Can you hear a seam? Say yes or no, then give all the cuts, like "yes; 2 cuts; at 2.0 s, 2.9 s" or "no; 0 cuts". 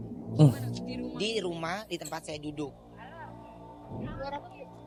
no; 0 cuts